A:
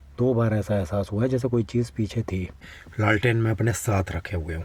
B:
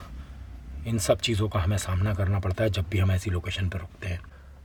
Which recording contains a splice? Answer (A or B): A